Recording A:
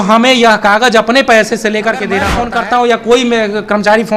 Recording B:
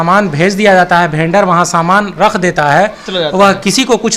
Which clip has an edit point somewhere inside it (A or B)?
A